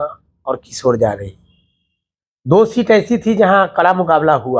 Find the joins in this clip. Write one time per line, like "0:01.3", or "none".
none

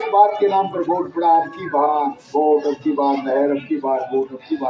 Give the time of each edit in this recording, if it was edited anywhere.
none

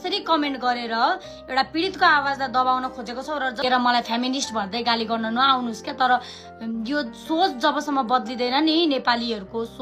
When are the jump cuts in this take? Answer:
0:03.6

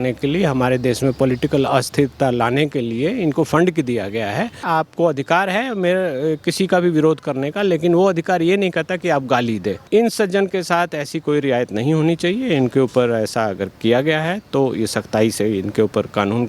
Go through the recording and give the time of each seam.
0:04.6
0:09.8

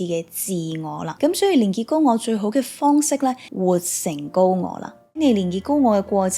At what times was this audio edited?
0:01.1
0:03.5
0:05.2

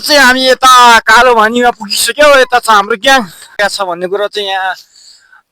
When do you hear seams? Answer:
0:03.6

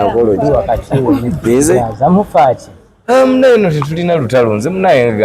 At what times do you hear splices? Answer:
0:01.8

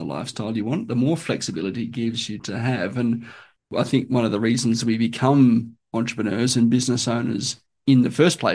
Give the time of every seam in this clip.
0:02.3
0:03.7

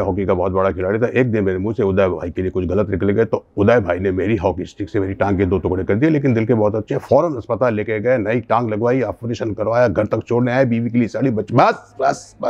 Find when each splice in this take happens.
none

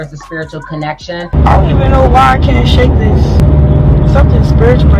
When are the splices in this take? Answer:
0:01.3
0:03.4

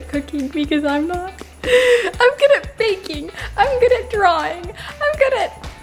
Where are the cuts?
none

